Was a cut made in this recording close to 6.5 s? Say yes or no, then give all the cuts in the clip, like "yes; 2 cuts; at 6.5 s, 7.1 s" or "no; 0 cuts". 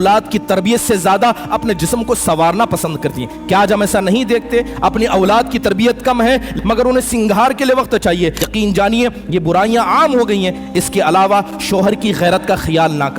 yes; 2 cuts; at 6.5 s, 8.4 s